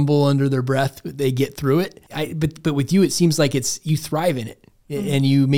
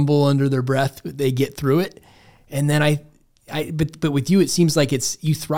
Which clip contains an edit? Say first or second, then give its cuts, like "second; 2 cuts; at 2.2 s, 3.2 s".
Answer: first; 1 cut; at 2.0 s